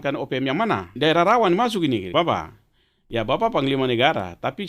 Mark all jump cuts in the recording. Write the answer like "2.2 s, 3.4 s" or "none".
0.9 s, 2.1 s